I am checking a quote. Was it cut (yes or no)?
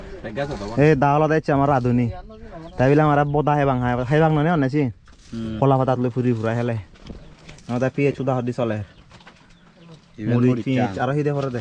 no